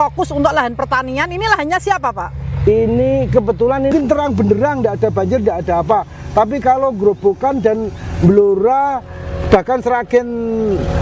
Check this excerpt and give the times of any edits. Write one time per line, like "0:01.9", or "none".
0:03.9